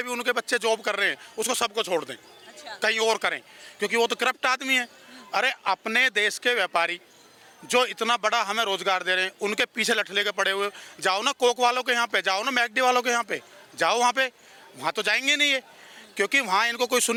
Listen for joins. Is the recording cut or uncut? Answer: uncut